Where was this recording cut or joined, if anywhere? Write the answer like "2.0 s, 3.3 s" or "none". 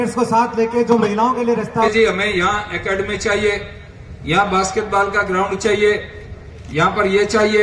1.9 s